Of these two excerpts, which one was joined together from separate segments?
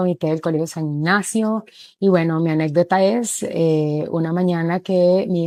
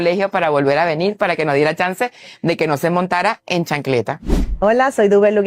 second; 1 cut; at 2.3 s

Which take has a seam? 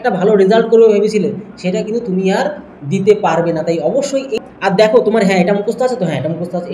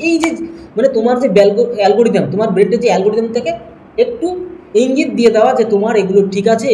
first; 1 cut; at 4.4 s

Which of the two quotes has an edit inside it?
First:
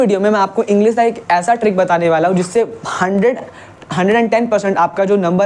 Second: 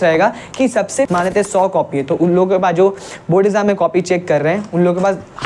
second; 1 cut; at 1.1 s

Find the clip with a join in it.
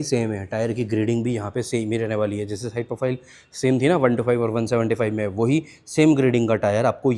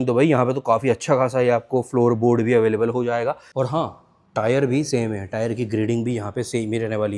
second; 1 cut; at 3.4 s

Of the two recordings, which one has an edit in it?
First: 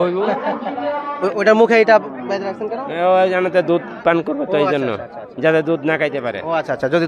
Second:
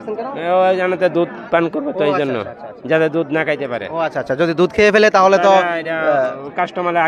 first; 1 cut; at 1.1 s

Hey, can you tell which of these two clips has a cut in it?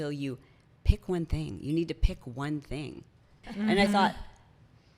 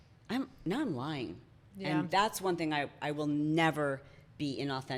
first; 1 cut; at 3.4 s

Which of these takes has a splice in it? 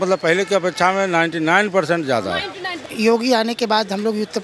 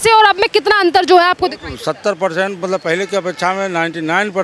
first; 1 cut; at 2.7 s

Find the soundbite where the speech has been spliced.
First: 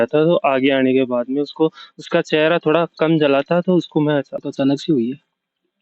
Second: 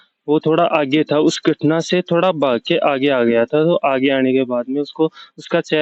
first; 1 cut; at 4.3 s

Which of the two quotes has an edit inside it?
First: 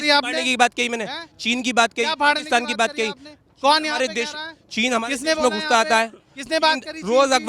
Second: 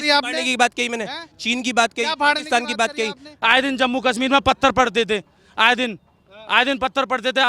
second; 1 cut; at 3.3 s

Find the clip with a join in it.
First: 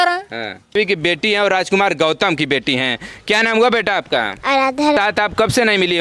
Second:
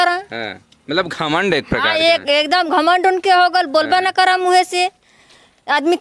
first; 2 cuts; at 0.8 s, 5.0 s

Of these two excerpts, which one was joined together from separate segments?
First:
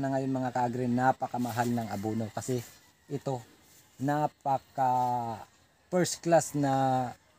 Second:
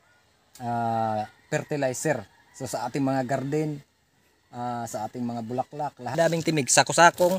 second; 1 cut; at 6.2 s

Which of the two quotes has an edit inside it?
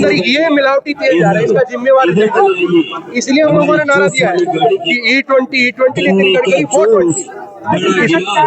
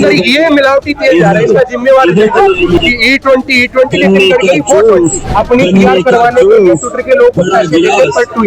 second; 2 cuts; at 2.8 s, 5.2 s

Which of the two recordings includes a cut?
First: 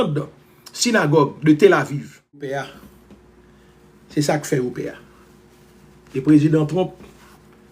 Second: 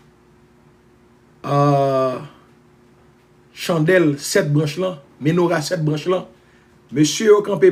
first; 1 cut; at 2.7 s

